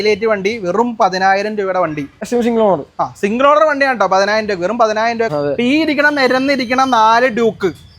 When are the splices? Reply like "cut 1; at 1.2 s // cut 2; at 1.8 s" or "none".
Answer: cut 1; at 2.2 s // cut 2; at 5.3 s